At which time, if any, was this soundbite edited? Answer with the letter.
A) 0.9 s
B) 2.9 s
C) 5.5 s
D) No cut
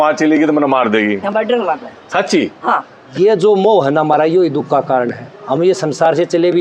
B